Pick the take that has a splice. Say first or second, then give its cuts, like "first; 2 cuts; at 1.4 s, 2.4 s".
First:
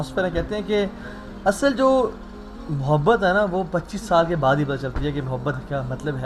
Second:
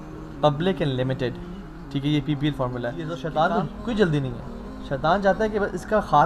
second; 1 cut; at 3.1 s